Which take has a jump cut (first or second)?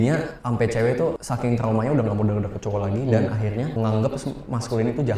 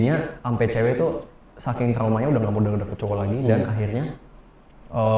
first